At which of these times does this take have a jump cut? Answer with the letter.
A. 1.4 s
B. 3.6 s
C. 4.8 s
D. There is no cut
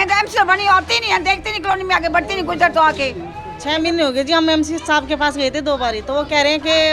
B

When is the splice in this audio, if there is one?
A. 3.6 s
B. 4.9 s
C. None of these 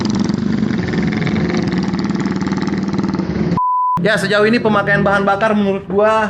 A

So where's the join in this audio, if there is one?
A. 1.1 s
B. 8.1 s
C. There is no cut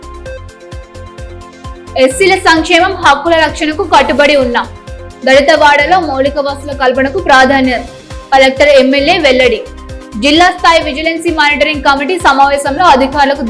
C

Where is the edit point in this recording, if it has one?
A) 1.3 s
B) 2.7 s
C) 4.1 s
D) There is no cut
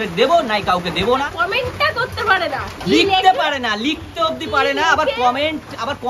A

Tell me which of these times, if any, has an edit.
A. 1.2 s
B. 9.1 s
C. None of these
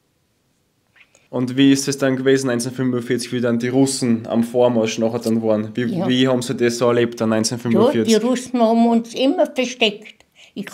A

